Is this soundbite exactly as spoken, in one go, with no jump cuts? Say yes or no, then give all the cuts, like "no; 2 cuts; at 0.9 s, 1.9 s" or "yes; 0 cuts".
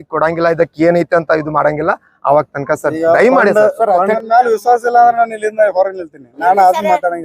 no; 1 cut; at 4.2 s